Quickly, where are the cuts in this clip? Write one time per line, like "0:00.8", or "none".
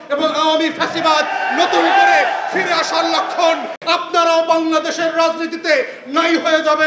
0:03.8